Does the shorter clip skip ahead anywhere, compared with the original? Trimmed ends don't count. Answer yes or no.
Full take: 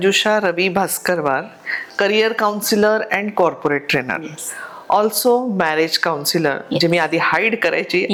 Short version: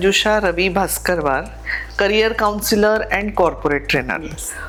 no